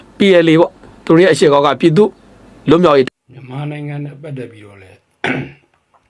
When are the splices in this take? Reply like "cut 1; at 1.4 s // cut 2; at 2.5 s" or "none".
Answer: cut 1; at 3.1 s